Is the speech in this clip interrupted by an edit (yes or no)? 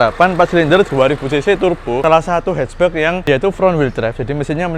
yes